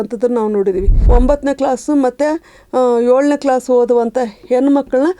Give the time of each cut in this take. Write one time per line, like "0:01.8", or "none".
0:01.0